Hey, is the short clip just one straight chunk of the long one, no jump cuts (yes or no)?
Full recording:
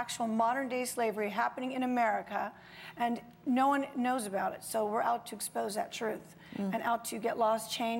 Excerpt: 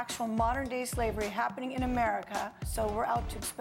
no